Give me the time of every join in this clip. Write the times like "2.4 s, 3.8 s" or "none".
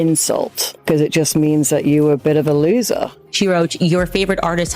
3.2 s